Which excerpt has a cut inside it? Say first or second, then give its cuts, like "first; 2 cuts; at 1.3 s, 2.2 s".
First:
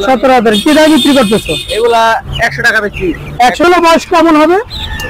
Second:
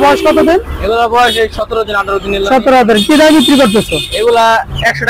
first; 1 cut; at 3.6 s